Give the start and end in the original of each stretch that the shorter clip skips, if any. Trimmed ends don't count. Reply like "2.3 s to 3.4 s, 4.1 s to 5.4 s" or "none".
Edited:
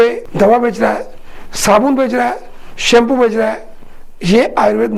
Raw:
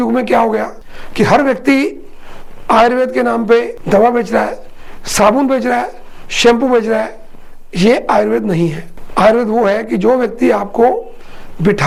none